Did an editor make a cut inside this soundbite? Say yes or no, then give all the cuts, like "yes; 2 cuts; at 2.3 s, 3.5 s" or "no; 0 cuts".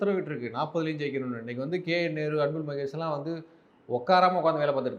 no; 0 cuts